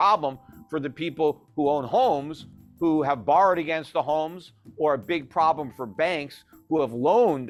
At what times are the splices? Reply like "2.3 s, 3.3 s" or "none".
none